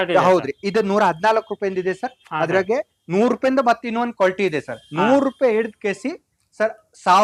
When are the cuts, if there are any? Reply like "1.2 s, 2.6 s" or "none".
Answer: none